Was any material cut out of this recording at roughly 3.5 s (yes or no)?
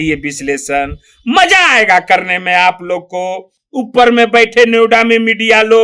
no